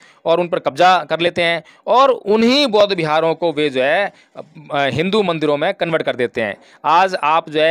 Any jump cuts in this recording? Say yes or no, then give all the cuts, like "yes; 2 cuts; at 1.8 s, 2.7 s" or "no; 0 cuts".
no; 0 cuts